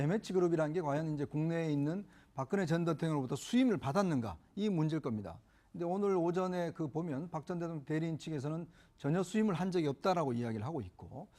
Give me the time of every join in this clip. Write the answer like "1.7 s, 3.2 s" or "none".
none